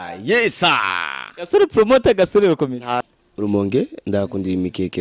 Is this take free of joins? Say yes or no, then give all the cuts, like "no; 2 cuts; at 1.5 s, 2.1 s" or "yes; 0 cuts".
no; 1 cut; at 3.1 s